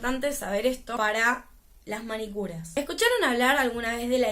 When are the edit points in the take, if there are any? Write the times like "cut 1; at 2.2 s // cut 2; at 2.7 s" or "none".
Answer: cut 1; at 1.0 s // cut 2; at 2.6 s

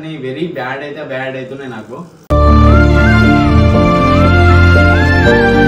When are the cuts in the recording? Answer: cut 1; at 2.1 s

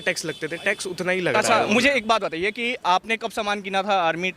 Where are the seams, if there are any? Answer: cut 1; at 1.4 s

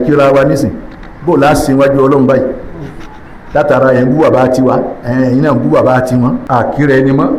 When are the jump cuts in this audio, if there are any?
cut 1; at 6.4 s

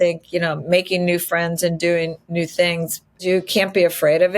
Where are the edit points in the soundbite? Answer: cut 1; at 3.2 s

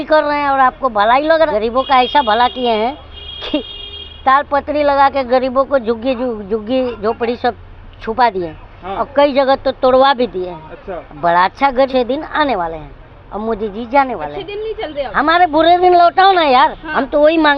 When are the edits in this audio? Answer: cut 1; at 1.3 s // cut 2; at 11.9 s

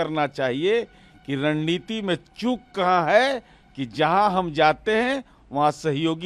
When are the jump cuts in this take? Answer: none

